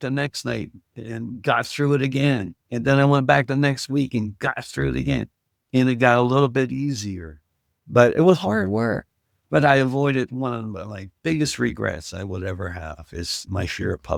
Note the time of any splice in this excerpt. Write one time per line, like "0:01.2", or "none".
none